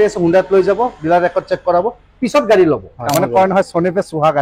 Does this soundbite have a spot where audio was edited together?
yes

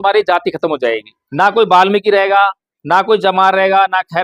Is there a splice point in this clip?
yes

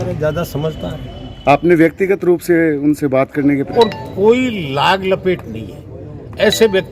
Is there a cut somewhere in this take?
yes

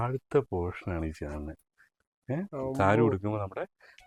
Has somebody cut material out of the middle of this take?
no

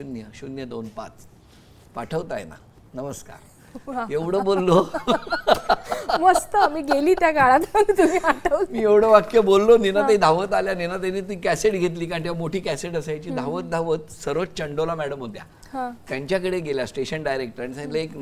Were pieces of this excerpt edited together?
no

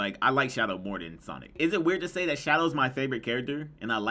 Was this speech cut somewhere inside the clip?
no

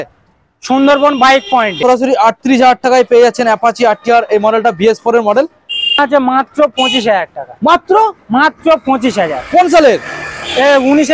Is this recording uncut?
no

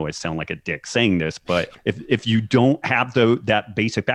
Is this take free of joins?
no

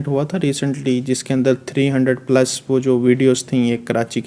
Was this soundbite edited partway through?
no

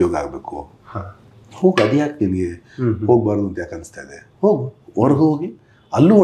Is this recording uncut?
yes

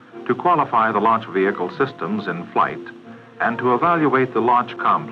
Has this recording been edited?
yes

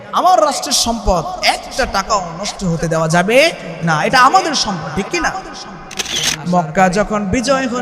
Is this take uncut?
no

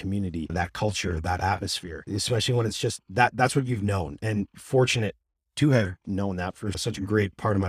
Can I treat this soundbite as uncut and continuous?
no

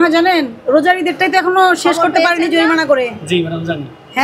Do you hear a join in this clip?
no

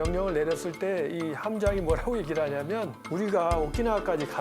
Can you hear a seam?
yes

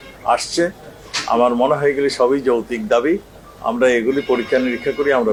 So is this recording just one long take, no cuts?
yes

